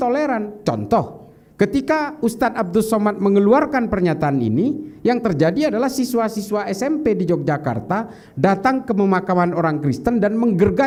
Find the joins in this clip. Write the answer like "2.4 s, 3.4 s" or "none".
none